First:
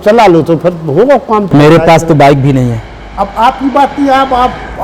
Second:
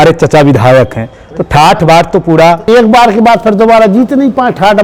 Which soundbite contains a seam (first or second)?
first